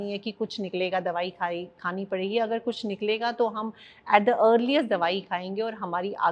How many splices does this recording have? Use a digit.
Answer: 0